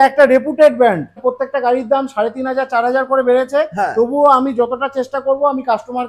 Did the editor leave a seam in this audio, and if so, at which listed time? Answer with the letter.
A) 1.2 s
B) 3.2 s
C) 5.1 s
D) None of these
A